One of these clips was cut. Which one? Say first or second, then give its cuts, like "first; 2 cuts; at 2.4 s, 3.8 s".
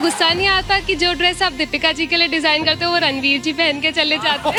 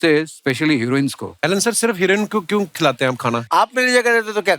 second; 2 cuts; at 1.3 s, 3.4 s